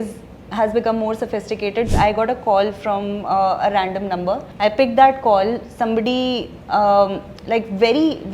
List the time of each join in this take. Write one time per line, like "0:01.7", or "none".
0:01.9
0:04.5